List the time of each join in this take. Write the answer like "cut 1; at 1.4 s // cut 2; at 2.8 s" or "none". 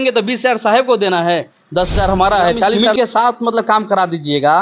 cut 1; at 2.9 s